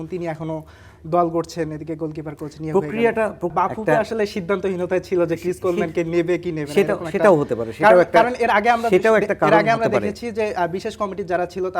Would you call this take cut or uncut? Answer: cut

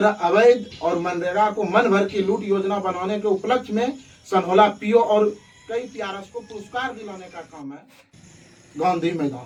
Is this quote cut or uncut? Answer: uncut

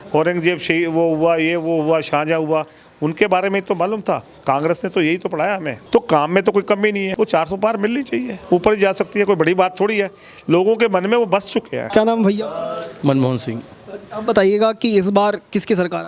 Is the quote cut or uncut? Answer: cut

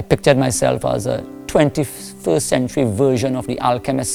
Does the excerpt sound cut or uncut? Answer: uncut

